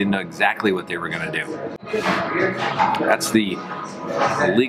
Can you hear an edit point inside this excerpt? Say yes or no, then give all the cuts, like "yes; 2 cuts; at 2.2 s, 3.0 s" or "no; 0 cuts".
yes; 1 cut; at 1.7 s